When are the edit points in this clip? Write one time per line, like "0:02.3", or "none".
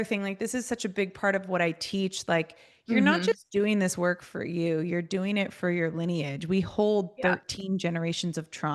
none